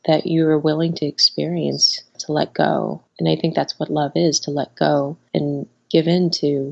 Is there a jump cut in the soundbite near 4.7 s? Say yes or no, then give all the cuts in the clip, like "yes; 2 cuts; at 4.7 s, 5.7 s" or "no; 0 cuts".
no; 1 cut; at 3.0 s